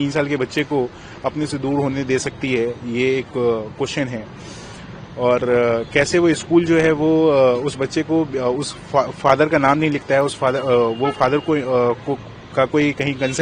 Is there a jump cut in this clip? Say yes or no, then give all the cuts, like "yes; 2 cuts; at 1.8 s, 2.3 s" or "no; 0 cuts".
no; 0 cuts